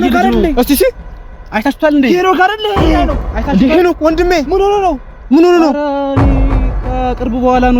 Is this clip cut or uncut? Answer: uncut